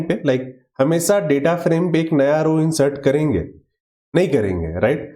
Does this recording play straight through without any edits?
yes; 0 cuts

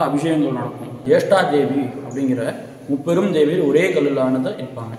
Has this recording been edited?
yes; 1 cut; at 1.0 s

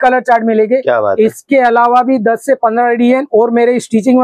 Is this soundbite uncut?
yes; 0 cuts

